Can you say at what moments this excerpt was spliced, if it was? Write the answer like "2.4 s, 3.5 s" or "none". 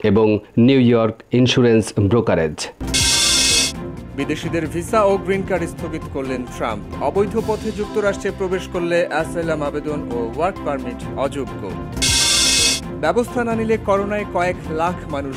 2.7 s